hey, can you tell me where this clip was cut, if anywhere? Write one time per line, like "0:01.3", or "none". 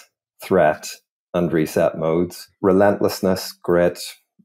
0:02.5